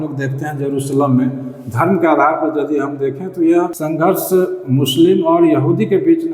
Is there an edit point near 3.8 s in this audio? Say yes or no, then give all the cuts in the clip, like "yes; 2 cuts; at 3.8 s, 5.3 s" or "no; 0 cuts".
yes; 1 cut; at 3.8 s